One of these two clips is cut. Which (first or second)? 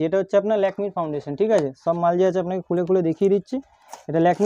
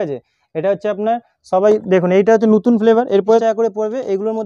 second